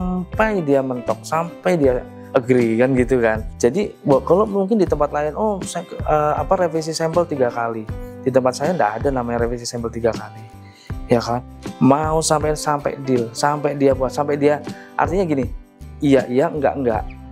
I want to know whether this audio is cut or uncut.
uncut